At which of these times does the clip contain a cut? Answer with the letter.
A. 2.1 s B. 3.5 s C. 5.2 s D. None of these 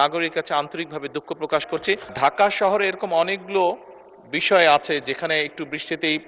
A